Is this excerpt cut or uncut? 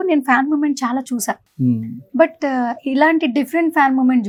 uncut